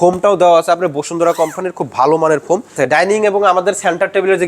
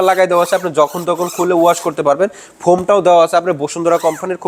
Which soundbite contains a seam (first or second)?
first